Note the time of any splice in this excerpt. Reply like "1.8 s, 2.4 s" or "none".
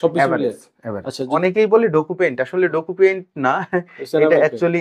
1.3 s